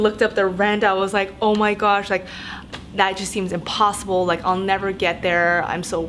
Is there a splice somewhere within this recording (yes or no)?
no